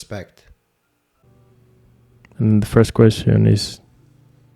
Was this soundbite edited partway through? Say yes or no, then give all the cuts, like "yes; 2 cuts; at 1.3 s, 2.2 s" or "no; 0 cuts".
yes; 1 cut; at 1.2 s